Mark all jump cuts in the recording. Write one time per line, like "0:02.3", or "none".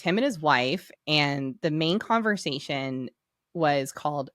0:00.9